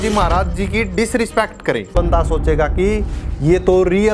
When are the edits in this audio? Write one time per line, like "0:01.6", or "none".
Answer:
0:01.9